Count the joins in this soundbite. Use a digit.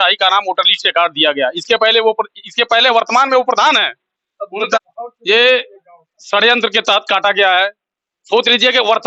1